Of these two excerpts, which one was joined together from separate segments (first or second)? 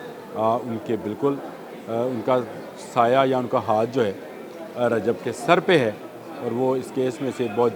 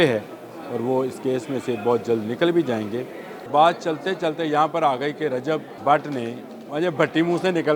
second